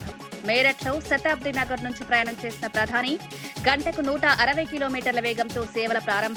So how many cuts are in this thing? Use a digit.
0